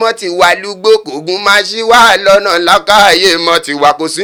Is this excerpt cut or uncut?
uncut